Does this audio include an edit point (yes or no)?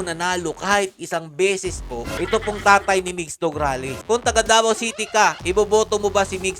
yes